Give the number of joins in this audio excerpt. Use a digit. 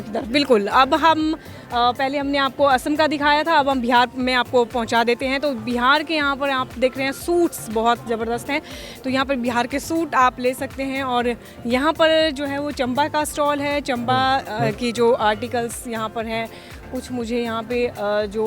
0